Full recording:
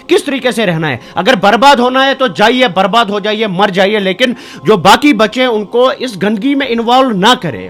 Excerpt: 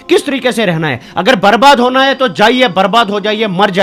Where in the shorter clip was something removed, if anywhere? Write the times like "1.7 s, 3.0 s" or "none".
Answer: none